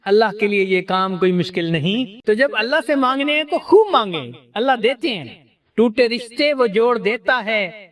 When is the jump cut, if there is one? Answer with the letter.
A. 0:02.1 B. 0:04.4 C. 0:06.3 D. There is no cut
A